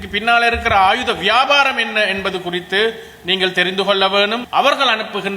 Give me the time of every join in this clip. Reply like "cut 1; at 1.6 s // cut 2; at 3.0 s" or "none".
cut 1; at 4.4 s